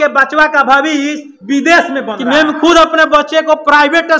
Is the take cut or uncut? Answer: cut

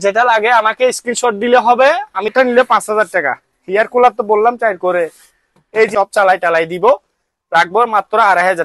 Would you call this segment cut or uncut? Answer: cut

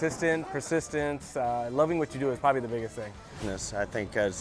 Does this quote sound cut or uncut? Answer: cut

